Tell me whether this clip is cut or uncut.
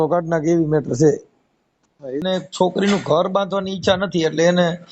cut